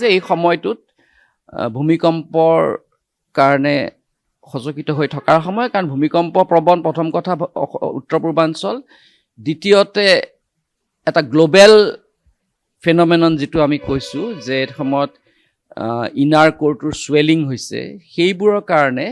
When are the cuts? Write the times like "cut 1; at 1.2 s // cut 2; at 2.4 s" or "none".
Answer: none